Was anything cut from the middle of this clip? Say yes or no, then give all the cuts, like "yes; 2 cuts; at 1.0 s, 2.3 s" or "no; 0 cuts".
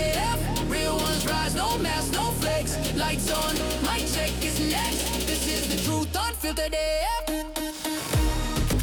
no; 0 cuts